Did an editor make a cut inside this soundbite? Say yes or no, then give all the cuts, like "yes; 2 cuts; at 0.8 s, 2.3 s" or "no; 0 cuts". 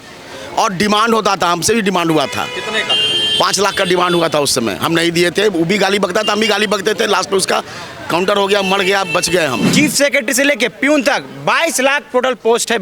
yes; 1 cut; at 9.6 s